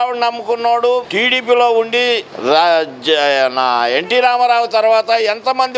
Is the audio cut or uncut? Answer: cut